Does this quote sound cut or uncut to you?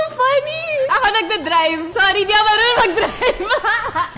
cut